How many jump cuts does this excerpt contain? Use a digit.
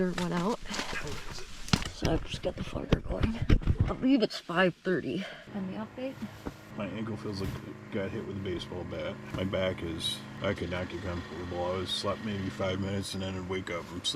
6